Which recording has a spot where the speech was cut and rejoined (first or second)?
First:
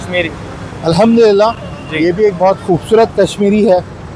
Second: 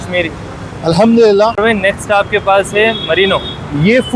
second